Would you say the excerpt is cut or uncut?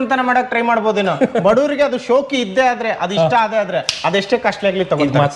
uncut